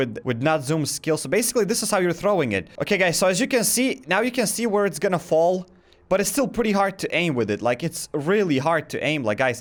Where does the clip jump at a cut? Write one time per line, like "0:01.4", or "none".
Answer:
none